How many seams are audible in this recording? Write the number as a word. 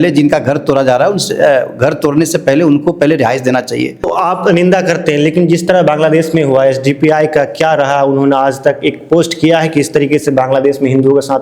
one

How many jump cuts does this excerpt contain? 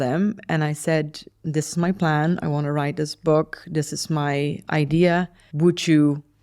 one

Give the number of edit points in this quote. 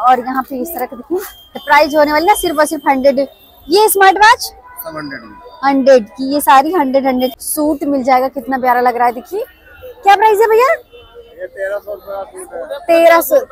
two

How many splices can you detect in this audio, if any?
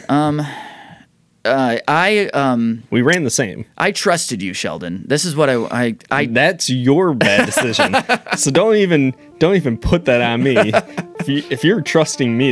zero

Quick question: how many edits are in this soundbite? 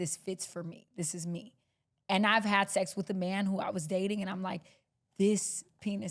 zero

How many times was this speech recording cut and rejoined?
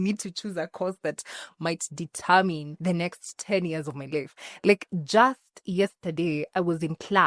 one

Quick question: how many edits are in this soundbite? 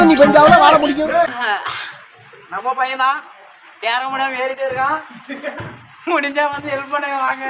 one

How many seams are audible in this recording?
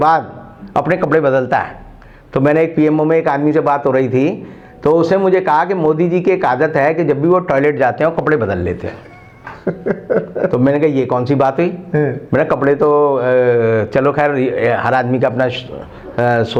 zero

